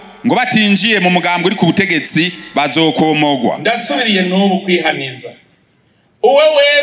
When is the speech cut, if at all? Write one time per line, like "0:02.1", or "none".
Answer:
0:03.6